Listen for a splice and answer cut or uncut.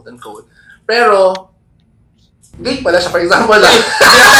uncut